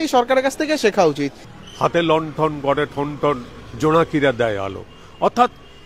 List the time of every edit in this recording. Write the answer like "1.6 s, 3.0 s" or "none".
1.4 s